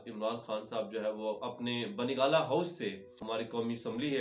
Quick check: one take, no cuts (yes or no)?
no